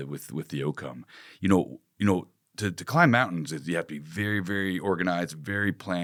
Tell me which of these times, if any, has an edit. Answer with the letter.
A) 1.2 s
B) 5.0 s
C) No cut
C